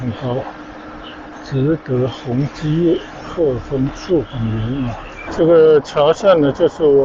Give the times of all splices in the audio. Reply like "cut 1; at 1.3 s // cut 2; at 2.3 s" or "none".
cut 1; at 5.2 s